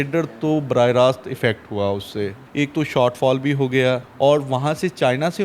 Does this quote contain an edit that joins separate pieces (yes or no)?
yes